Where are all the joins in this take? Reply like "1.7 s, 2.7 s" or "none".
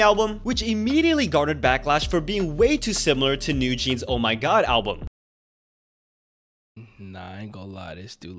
none